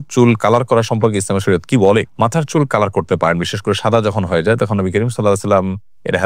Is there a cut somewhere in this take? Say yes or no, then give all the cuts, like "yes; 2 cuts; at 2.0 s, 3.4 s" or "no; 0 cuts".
no; 0 cuts